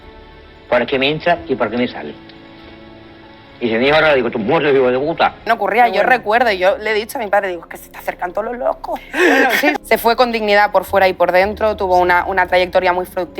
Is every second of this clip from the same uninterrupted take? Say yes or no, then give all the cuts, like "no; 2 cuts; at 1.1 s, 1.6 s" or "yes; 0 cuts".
no; 2 cuts; at 5.4 s, 9.8 s